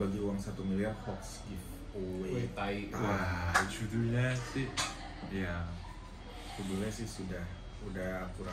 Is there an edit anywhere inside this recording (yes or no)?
no